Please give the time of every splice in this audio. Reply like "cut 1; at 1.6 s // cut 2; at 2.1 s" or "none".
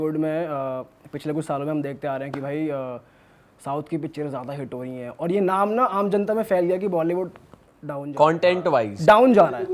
none